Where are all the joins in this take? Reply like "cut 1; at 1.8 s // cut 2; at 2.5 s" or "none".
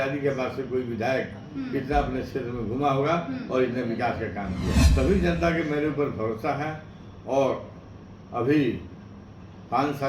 cut 1; at 4.8 s